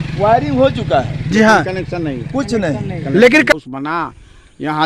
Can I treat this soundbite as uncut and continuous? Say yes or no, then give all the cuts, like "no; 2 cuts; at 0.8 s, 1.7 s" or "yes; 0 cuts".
no; 1 cut; at 3.5 s